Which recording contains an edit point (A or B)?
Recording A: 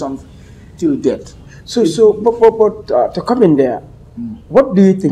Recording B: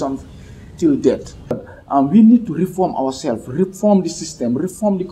B